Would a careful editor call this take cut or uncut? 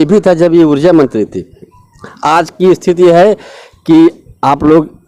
uncut